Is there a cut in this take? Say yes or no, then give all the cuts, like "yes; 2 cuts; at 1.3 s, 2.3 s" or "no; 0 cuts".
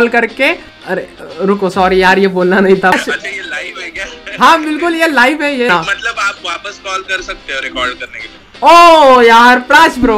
yes; 3 cuts; at 1.1 s, 2.9 s, 5.7 s